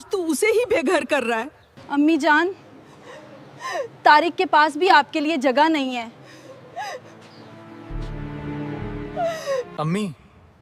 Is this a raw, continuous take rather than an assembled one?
yes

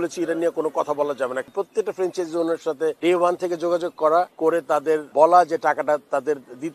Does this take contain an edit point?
yes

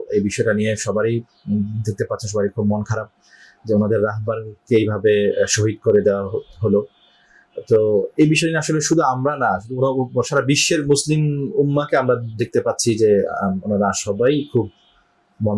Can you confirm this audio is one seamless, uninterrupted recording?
yes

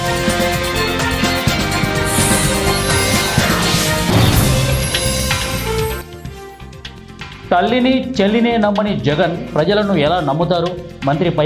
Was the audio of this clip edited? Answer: no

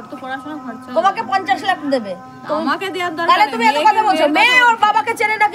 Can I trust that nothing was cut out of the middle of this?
yes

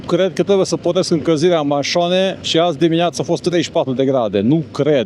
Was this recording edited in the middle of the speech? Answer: no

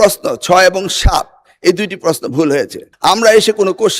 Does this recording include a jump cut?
yes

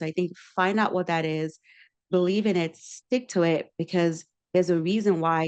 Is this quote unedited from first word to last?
yes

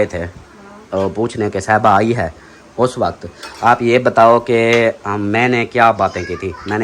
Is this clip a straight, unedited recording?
yes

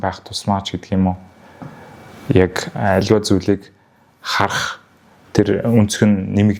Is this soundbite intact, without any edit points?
yes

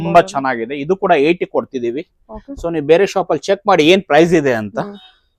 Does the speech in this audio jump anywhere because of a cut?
no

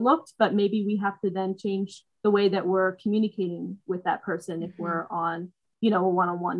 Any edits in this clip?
no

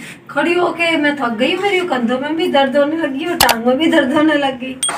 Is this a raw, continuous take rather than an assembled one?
yes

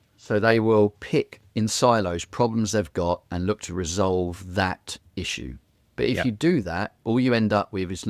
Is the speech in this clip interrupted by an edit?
no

